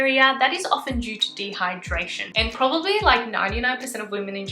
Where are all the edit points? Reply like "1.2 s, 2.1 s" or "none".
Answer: 2.2 s